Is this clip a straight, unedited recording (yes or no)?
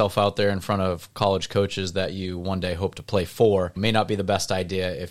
yes